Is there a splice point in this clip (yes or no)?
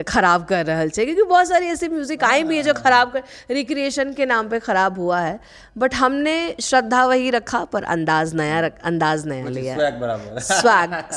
no